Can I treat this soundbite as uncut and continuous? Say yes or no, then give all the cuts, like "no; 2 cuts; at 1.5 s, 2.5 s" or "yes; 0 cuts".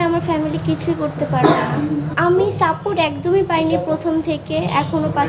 yes; 0 cuts